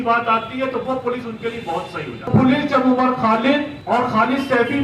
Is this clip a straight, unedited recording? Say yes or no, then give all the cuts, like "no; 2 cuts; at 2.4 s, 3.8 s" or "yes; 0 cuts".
no; 2 cuts; at 2.3 s, 3.7 s